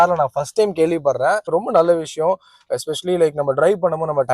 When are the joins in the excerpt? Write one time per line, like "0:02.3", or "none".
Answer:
0:01.5